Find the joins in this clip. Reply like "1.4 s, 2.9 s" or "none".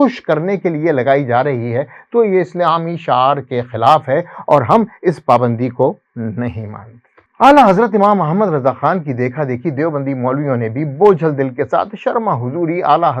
none